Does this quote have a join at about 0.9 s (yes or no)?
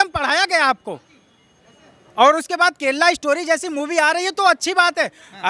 no